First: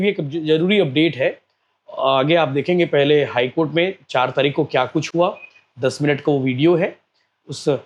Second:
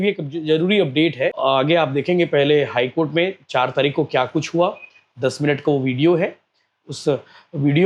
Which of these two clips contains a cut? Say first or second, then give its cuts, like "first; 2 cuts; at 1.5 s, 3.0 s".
second; 1 cut; at 1.4 s